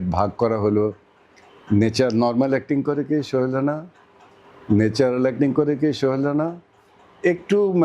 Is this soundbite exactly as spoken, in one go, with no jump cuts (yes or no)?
yes